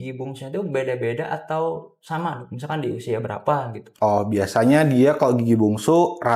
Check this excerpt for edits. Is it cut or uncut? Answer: uncut